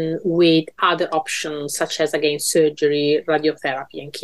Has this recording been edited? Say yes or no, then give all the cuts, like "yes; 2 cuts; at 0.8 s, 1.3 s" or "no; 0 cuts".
no; 0 cuts